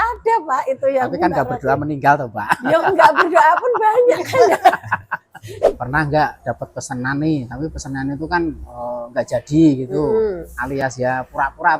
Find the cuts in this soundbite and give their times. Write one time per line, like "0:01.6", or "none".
0:05.5